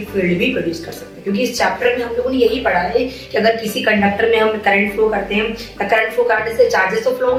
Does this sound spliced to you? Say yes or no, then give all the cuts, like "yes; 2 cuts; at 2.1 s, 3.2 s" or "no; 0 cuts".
no; 0 cuts